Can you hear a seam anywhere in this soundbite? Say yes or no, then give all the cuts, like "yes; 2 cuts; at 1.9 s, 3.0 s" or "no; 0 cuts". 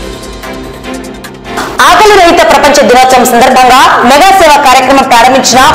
yes; 1 cut; at 1.5 s